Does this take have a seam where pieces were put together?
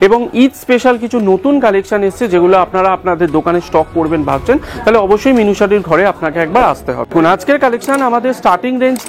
yes; 1 cut; at 7.1 s

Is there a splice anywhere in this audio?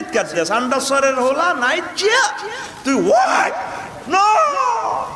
no; 0 cuts

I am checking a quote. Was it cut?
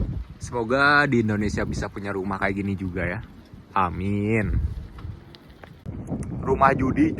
yes; 1 cut; at 5.9 s

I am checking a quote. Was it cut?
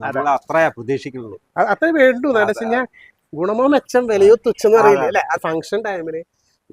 yes; 1 cut; at 5.4 s

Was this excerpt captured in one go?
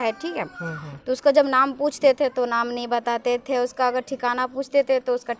yes; 0 cuts

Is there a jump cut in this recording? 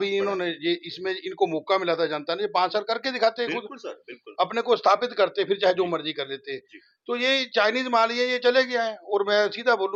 no; 0 cuts

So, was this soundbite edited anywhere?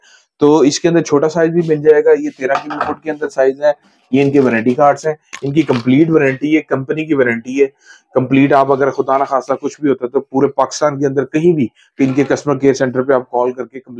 no; 0 cuts

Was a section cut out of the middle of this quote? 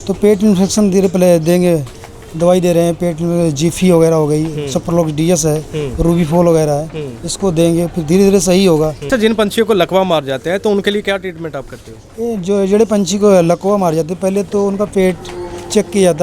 yes; 1 cut; at 9.0 s

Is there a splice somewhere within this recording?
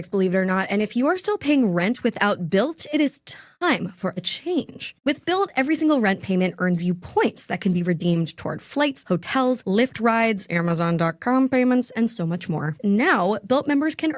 yes; 2 cuts; at 4.9 s, 12.8 s

